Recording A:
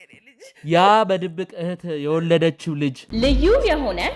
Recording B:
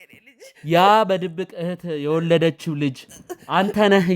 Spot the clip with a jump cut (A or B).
A